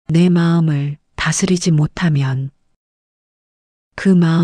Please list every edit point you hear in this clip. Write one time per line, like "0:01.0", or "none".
0:01.1
0:02.4